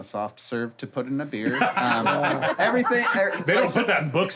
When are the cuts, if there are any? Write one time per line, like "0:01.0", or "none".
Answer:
none